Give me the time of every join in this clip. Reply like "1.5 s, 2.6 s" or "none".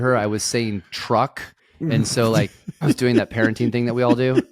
none